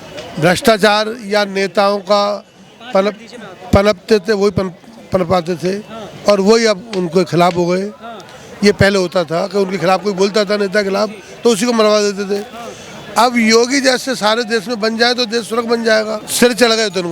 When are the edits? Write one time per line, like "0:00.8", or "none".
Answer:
0:16.2